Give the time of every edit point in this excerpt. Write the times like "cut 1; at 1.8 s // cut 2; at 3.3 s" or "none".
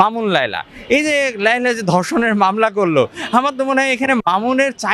none